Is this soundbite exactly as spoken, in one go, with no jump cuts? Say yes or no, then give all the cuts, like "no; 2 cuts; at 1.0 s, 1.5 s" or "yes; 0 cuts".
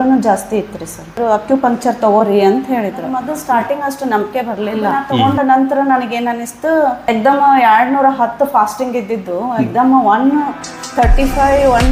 no; 4 cuts; at 1.1 s, 3.3 s, 5.1 s, 7.1 s